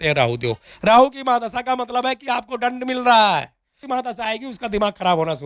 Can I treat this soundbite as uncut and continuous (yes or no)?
no